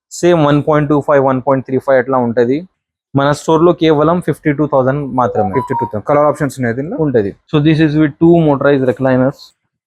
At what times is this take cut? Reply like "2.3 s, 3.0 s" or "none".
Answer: 7.4 s